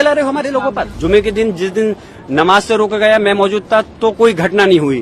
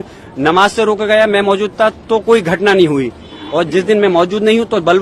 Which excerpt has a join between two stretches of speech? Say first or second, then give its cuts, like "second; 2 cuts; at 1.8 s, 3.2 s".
first; 1 cut; at 0.9 s